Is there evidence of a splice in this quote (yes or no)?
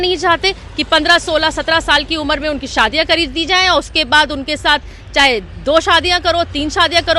no